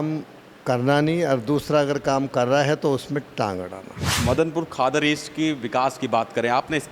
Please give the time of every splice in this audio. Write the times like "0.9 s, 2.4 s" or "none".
4.1 s